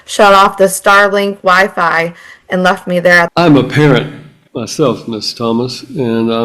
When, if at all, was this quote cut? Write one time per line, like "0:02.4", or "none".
0:03.3